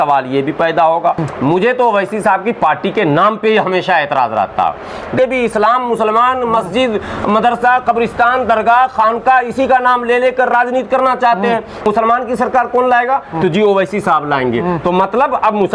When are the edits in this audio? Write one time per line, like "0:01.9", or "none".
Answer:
0:01.2
0:05.1
0:11.8